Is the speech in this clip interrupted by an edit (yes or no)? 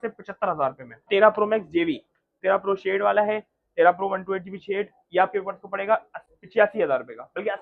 yes